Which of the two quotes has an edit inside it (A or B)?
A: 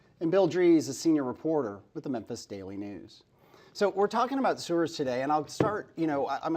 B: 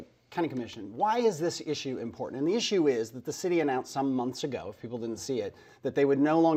A